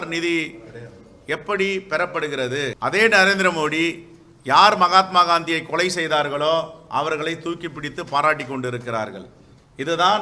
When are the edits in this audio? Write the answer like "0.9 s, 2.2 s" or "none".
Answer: 2.8 s